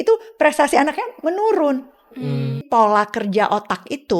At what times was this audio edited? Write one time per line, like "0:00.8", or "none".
0:02.6